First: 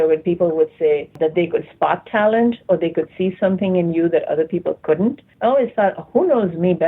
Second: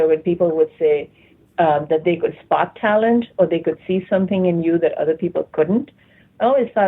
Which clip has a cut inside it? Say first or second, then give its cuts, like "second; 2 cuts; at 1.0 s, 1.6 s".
first; 2 cuts; at 1.1 s, 5.3 s